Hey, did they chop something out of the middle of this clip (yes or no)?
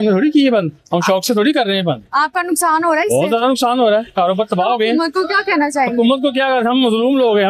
no